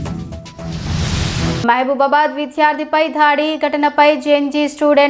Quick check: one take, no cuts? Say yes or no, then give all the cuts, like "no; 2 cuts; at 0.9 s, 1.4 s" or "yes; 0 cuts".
no; 1 cut; at 1.6 s